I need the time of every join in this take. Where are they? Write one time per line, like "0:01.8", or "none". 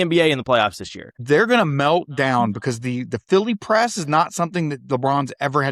0:01.1